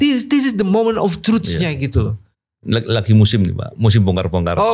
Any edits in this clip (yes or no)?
no